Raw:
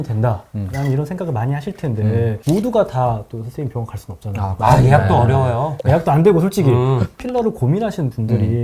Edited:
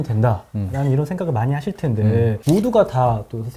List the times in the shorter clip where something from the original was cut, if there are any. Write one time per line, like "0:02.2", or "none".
none